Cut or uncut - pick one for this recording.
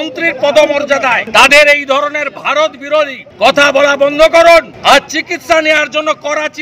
cut